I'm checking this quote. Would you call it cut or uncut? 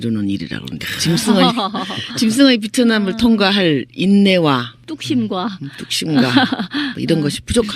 cut